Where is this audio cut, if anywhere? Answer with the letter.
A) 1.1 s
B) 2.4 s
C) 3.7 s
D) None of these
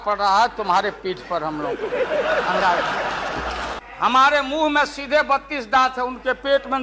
C